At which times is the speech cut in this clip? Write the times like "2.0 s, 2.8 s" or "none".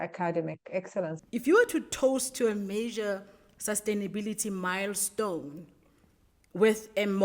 1.2 s